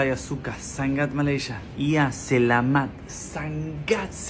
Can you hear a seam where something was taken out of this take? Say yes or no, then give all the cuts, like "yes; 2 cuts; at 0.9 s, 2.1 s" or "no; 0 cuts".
no; 0 cuts